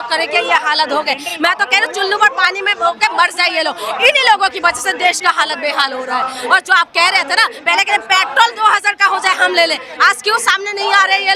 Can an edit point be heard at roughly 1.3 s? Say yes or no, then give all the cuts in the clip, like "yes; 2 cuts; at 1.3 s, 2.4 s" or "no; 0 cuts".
no; 0 cuts